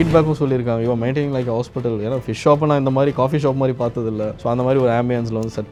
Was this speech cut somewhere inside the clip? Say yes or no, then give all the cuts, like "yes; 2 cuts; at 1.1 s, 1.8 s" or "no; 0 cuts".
no; 0 cuts